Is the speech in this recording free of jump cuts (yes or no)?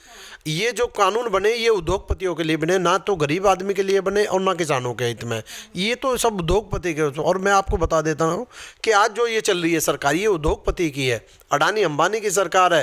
yes